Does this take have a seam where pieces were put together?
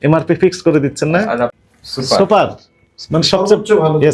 no; 0 cuts

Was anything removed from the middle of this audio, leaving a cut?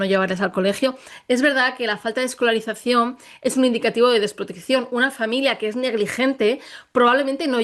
no; 0 cuts

